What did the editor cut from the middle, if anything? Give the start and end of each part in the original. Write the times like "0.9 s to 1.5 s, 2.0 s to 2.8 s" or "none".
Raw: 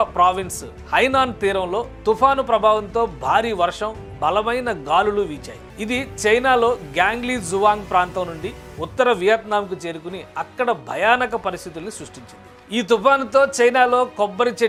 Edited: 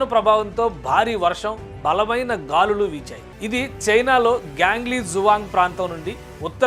none